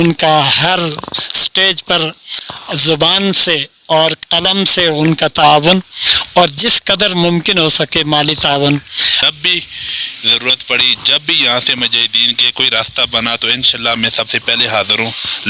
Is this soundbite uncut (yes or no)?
no